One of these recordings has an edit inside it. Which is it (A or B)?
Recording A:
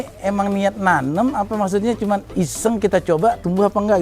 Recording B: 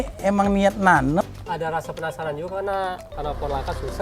B